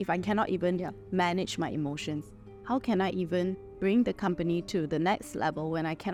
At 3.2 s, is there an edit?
no; 0 cuts

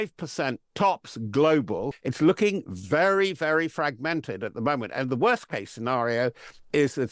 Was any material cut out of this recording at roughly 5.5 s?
no; 1 cut; at 2.0 s

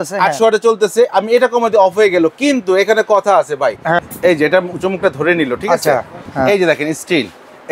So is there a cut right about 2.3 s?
no; 2 cuts; at 4.0 s, 6.2 s

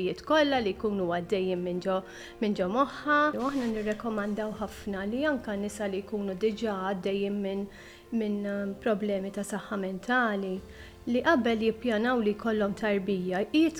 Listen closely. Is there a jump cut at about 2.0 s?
no; 1 cut; at 3.3 s

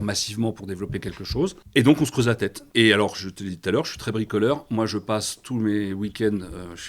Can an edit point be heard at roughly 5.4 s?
no; 2 cuts; at 1.6 s, 2.6 s

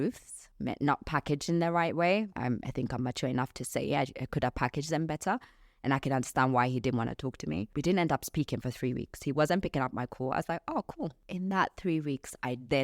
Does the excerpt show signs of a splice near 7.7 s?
yes; 3 cuts; at 2.3 s, 7.7 s, 11.2 s

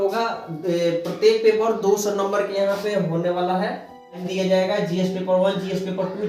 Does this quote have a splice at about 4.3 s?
yes; 1 cut; at 4.3 s

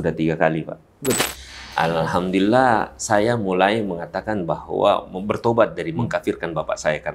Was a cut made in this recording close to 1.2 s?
yes; 1 cut; at 1.2 s

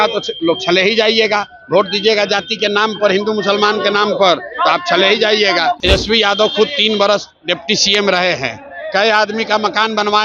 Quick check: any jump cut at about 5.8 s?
yes; 1 cut; at 5.8 s

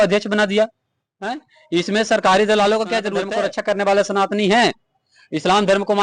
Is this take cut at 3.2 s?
yes; 1 cut; at 3.2 s

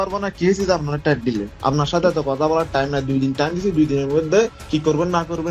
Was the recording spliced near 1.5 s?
yes; 2 cuts; at 1.5 s, 4.6 s

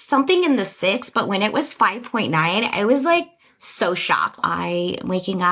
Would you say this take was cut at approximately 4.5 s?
yes; 1 cut; at 4.5 s

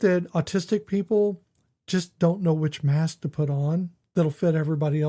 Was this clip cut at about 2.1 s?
no; 0 cuts

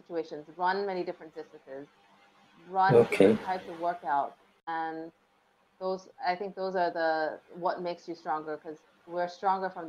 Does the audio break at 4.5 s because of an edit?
yes; 1 cut; at 4.5 s

